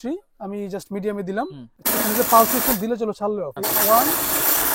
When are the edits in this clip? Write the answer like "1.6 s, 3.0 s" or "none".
1.7 s, 3.6 s